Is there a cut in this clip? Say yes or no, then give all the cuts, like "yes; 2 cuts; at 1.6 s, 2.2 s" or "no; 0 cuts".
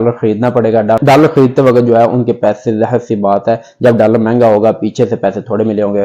no; 0 cuts